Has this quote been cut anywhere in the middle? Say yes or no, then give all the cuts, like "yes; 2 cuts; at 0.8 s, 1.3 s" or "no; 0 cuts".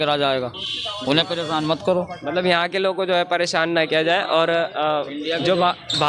no; 0 cuts